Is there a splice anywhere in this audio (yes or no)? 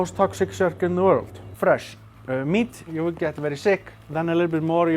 yes